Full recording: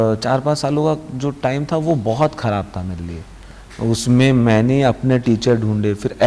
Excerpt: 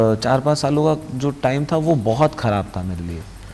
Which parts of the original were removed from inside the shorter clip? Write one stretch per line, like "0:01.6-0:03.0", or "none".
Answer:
none